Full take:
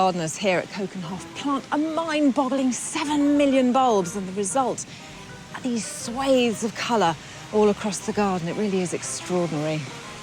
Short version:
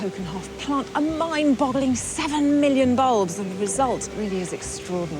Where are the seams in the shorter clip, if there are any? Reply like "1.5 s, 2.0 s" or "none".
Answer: 4.1 s